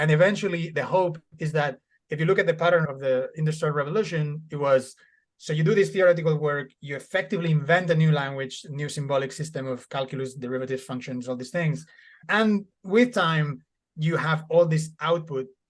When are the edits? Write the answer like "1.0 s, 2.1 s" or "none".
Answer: none